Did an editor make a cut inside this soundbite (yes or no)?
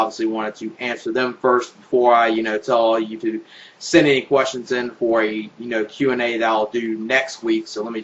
yes